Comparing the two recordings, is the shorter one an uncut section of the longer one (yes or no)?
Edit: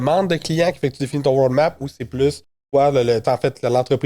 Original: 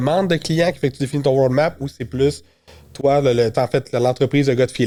no